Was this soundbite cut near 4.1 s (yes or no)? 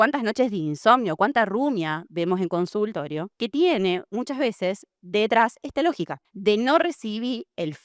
yes